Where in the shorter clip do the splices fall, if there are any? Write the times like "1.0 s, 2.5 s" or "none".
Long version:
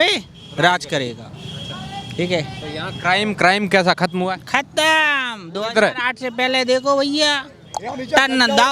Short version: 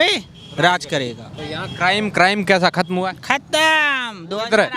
1.4 s